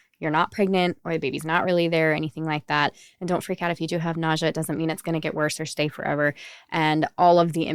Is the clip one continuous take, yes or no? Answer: yes